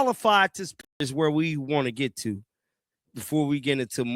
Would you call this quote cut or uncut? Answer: cut